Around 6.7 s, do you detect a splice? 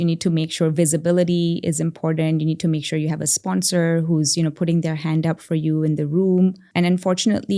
yes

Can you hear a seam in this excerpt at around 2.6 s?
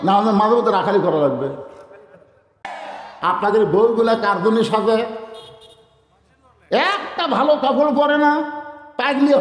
yes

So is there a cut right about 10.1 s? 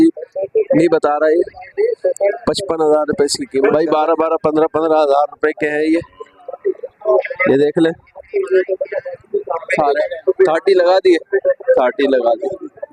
yes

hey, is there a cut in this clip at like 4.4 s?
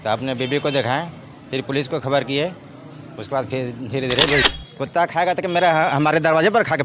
yes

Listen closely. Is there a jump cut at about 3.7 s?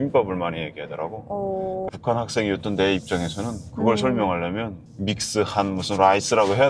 no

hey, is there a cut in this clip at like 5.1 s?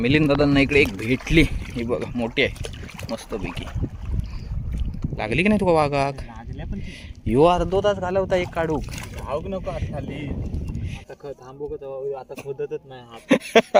yes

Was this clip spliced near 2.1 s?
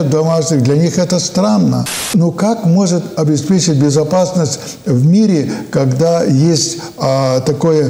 yes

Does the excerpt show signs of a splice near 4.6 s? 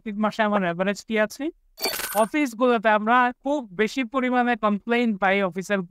no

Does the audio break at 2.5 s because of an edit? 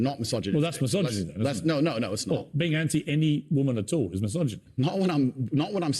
no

